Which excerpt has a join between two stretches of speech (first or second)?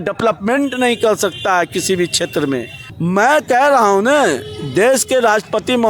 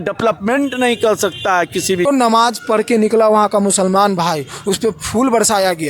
second